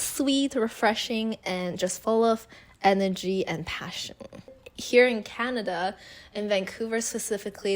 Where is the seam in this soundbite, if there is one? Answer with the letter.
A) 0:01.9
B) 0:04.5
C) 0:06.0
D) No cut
B